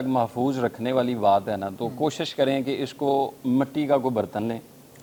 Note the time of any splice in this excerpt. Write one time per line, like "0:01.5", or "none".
none